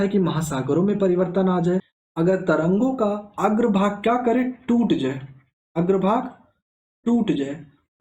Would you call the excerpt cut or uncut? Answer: cut